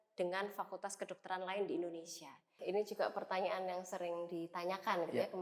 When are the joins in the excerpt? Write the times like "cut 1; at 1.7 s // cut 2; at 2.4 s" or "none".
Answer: cut 1; at 2.5 s